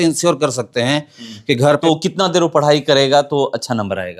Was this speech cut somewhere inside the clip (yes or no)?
yes